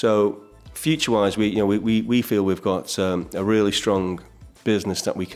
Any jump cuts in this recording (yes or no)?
no